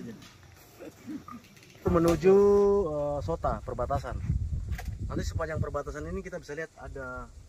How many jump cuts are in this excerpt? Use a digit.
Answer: 1